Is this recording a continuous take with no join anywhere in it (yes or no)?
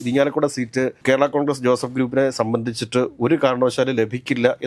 yes